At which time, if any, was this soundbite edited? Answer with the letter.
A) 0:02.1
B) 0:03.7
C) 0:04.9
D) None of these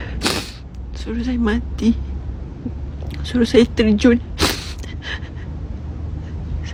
D